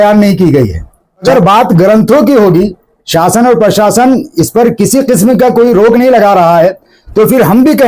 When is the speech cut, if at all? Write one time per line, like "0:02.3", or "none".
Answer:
0:01.2